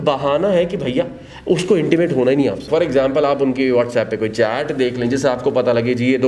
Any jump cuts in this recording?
yes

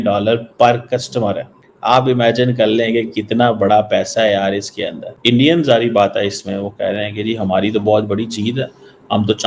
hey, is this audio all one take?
yes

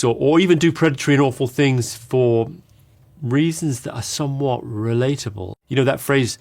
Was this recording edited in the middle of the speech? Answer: yes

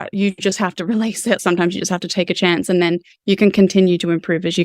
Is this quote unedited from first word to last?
no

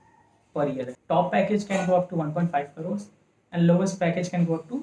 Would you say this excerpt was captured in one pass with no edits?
no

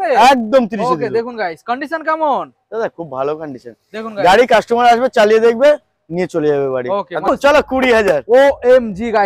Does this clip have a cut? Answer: yes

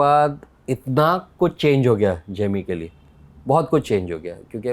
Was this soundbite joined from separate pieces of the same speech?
no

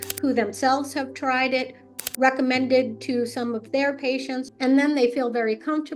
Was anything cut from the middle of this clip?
yes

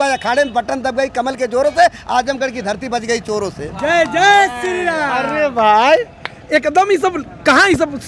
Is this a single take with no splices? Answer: yes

